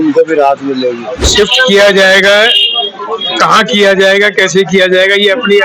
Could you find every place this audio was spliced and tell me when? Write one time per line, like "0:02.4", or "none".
0:01.3